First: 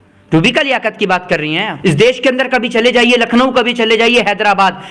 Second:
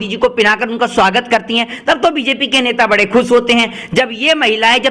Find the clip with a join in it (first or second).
first